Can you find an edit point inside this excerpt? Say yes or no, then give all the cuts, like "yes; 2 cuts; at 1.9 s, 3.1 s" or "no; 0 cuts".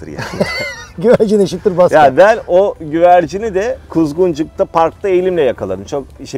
no; 0 cuts